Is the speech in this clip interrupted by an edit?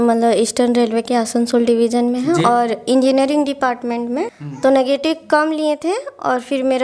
yes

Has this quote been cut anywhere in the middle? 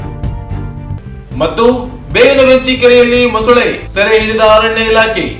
yes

